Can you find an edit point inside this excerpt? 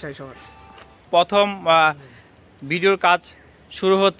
yes; 1 cut; at 0.9 s

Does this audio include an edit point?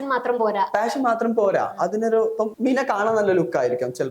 yes; 1 cut; at 2.5 s

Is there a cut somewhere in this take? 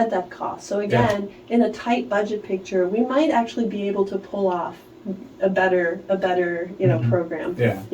no; 0 cuts

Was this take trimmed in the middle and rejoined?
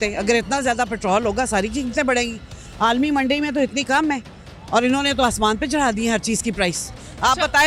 no; 0 cuts

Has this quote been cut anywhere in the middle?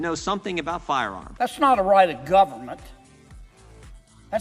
yes; 1 cut; at 1.3 s

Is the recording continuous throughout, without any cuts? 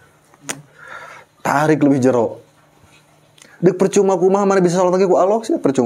yes; 0 cuts

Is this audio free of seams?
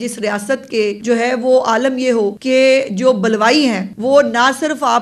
no; 3 cuts; at 1.0 s, 2.4 s, 3.9 s

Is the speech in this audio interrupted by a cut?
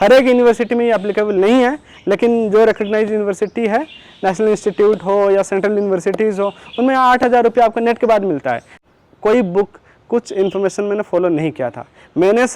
yes; 1 cut; at 8.7 s

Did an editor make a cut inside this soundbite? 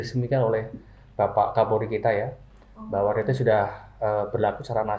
no; 0 cuts

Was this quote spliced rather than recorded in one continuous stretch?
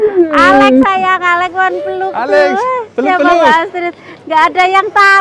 no; 0 cuts

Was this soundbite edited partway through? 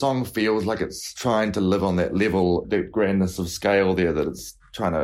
yes; 2 cuts; at 1.1 s, 2.8 s

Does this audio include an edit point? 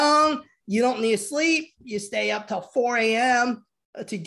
no; 0 cuts

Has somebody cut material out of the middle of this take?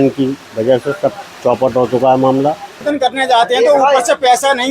yes; 1 cut; at 2.9 s

